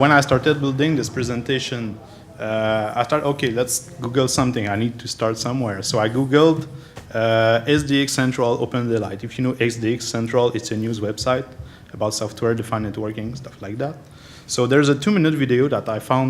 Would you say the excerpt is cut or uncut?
cut